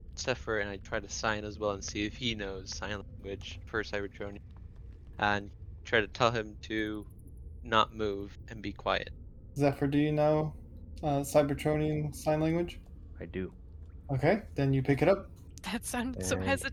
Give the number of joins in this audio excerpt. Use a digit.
0